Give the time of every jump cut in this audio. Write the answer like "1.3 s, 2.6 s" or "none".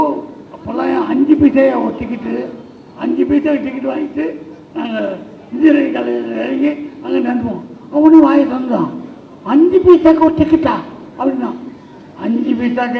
none